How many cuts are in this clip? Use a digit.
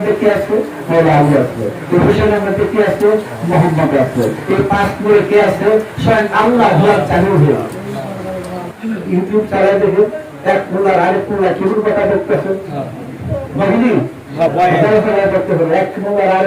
1